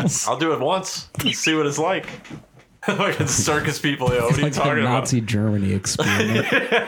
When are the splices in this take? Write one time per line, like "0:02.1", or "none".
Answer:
0:02.8